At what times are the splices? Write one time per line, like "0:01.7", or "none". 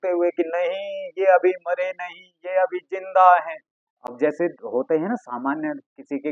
none